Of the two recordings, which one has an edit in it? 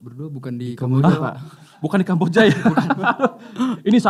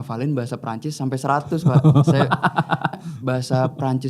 second; 1 cut; at 3.0 s

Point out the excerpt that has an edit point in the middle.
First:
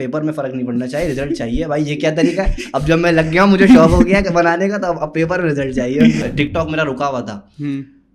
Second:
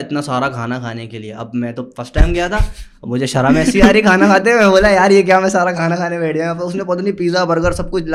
first; 1 cut; at 6.3 s

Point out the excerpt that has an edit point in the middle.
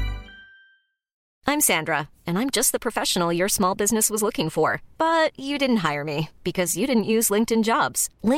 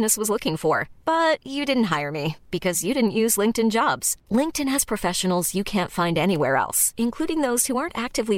first; 1 cut; at 1.2 s

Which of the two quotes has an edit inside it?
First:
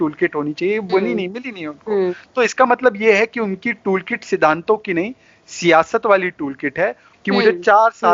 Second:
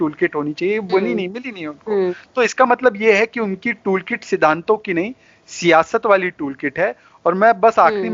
first; 1 cut; at 7.1 s

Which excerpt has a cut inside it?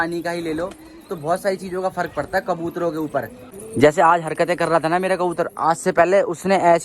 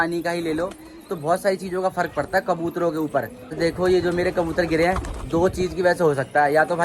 first; 1 cut; at 3.4 s

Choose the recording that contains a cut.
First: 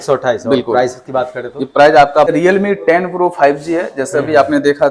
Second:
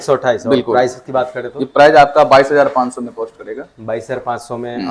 first; 1 cut; at 2.3 s

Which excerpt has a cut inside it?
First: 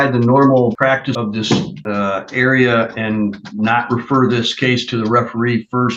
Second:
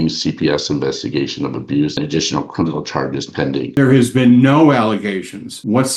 second; 2 cuts; at 1.9 s, 3.7 s

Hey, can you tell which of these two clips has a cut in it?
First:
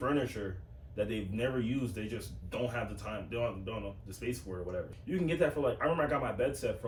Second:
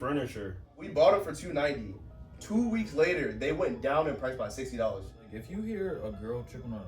second; 2 cuts; at 0.8 s, 5.3 s

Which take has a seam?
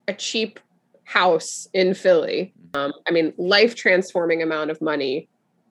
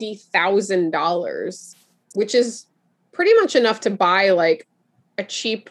first; 1 cut; at 2.8 s

